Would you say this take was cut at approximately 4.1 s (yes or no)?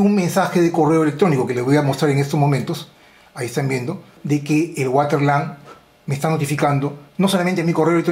yes